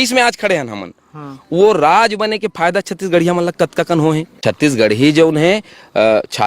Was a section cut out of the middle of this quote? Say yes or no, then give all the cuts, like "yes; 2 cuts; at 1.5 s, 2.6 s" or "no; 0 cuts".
yes; 1 cut; at 4.4 s